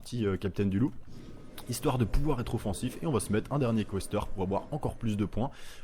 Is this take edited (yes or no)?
yes